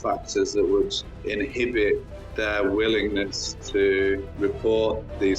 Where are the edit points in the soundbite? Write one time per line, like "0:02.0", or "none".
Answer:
0:01.0
0:04.3